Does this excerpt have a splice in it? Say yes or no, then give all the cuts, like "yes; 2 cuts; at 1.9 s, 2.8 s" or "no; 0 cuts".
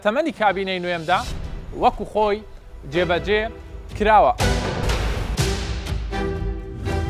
yes; 1 cut; at 4.4 s